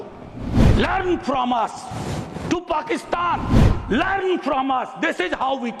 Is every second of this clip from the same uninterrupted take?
yes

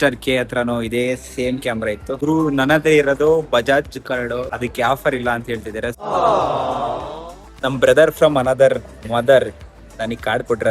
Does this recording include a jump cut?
yes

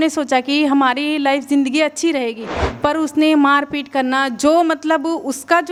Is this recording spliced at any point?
no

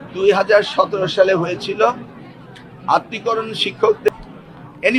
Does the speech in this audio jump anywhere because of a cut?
yes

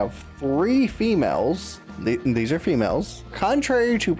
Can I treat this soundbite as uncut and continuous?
yes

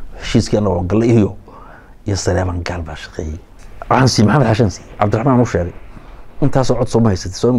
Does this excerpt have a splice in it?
yes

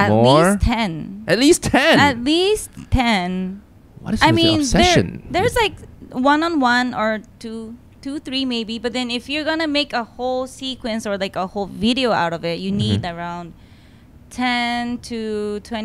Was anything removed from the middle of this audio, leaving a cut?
no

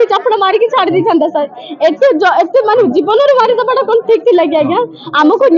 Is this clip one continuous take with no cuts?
yes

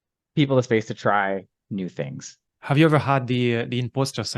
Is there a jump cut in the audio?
yes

